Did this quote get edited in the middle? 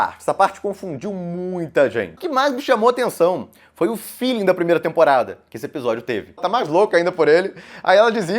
yes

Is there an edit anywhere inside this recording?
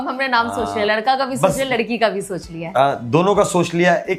no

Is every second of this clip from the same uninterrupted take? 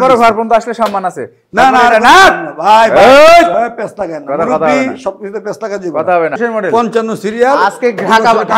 no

